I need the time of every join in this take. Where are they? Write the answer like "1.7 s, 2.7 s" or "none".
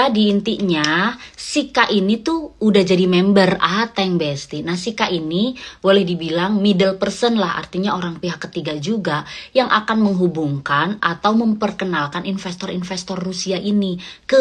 none